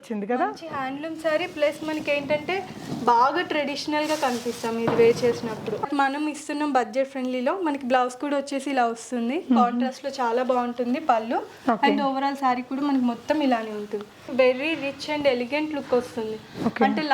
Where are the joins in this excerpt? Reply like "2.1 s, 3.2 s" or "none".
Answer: 5.8 s, 14.2 s